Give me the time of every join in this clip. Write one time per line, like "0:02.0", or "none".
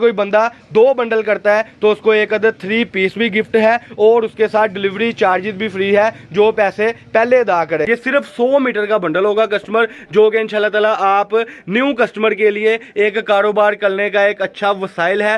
0:07.8